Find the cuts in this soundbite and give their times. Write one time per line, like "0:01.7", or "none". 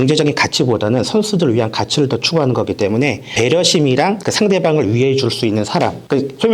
0:03.3